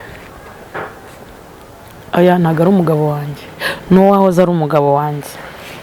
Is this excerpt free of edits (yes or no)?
yes